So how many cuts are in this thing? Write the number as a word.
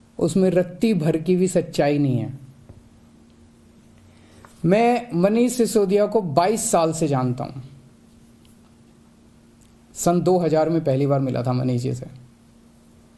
zero